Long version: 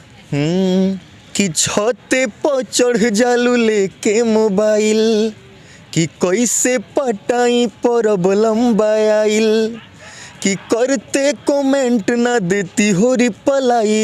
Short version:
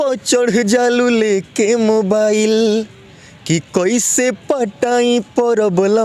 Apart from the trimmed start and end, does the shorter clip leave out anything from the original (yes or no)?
no